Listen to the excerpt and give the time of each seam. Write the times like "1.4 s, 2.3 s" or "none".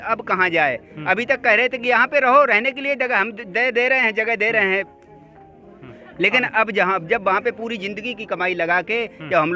none